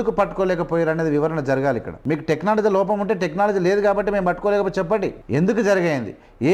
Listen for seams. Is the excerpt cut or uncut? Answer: cut